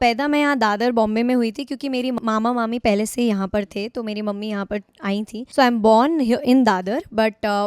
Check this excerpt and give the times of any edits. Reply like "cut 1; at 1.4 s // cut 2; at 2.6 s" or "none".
cut 1; at 2.2 s // cut 2; at 5.4 s

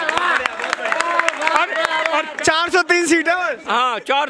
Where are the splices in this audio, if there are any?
cut 1; at 2.3 s

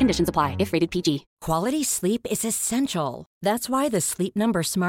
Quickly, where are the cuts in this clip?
cut 1; at 1.3 s

